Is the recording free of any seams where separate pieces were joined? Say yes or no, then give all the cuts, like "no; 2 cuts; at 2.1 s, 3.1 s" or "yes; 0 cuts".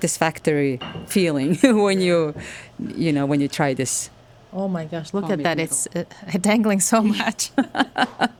yes; 0 cuts